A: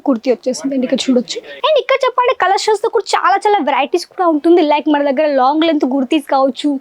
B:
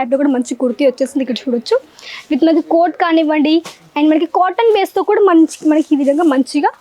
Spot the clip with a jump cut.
A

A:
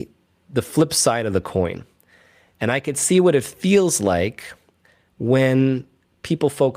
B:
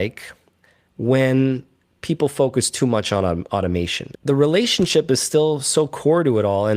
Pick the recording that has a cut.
B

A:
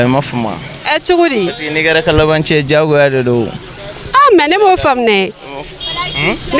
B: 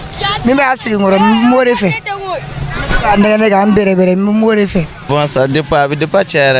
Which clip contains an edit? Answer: B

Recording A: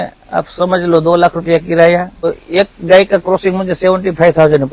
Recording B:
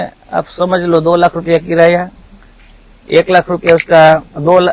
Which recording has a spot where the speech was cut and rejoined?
A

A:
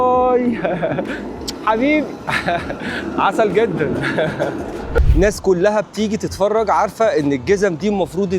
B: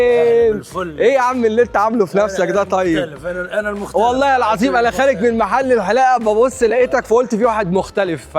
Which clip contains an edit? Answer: A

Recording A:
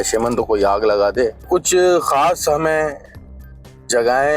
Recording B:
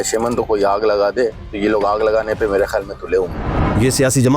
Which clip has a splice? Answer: A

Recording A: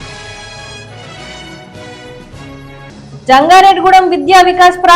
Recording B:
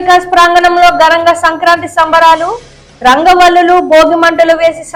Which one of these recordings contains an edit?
A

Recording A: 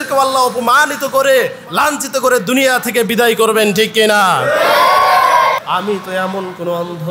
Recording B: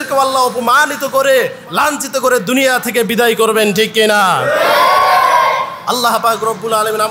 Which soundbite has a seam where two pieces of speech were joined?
A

